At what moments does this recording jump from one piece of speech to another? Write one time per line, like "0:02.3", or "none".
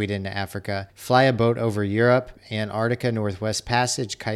0:00.9
0:02.4